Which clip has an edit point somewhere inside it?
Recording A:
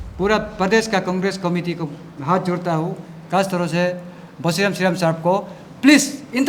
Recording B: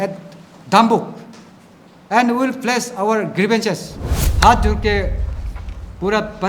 B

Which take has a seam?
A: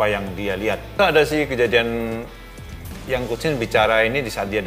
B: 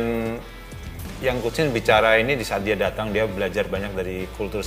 A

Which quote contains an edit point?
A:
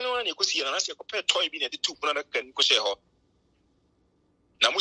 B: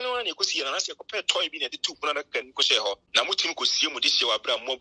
B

